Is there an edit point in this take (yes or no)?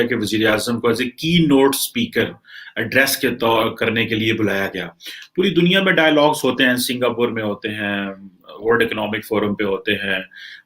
no